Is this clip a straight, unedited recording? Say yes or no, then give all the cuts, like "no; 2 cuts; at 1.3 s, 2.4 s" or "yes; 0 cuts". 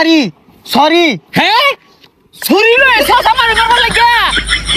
yes; 0 cuts